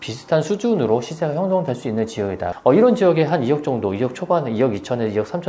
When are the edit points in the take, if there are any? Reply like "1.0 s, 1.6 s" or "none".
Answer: 2.5 s